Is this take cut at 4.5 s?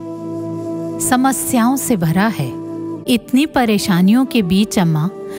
no; 1 cut; at 2.9 s

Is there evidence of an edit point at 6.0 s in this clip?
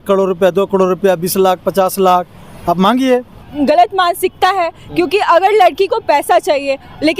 no; 1 cut; at 3.4 s

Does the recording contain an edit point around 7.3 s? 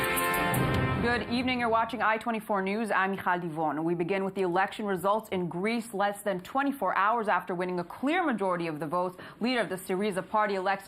no; 0 cuts

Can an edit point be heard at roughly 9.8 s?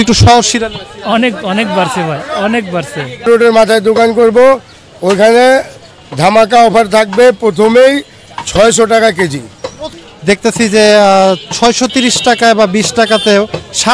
yes; 2 cuts; at 3.3 s, 9.8 s

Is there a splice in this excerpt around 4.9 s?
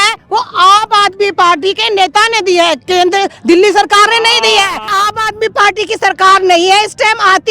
yes; 1 cut; at 4.9 s

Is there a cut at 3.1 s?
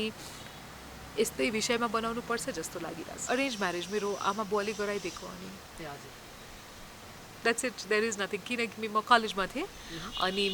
yes; 1 cut; at 3.1 s

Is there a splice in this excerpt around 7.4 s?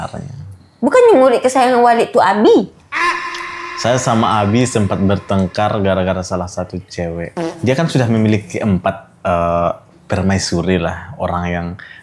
yes; 1 cut; at 7.4 s

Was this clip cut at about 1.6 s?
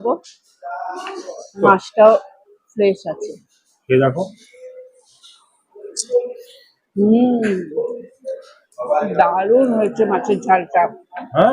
yes; 1 cut; at 1.6 s

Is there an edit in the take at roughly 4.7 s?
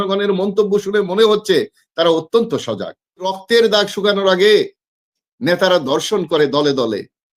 no; 1 cut; at 3.4 s

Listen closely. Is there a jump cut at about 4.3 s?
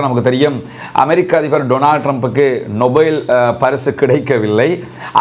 no; 0 cuts

